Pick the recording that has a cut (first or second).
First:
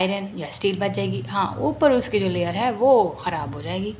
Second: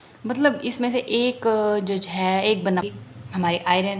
second